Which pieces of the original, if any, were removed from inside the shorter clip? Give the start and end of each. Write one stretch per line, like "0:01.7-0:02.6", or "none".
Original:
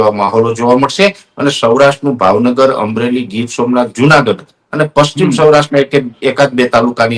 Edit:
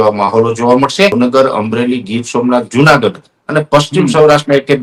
0:01.1-0:02.4